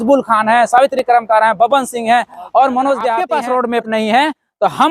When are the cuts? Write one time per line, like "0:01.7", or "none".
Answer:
0:03.3

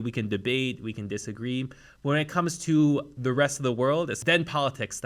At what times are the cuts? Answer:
0:04.2

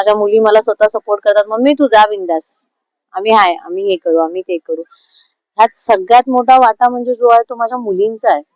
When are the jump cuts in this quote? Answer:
none

